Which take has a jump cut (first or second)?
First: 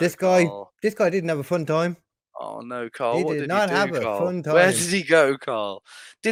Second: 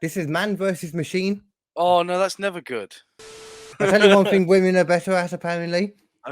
second